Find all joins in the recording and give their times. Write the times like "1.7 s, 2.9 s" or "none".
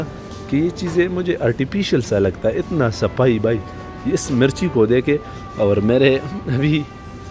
none